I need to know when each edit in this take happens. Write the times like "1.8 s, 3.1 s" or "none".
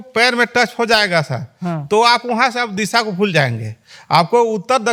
none